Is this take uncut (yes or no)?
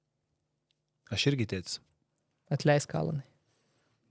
yes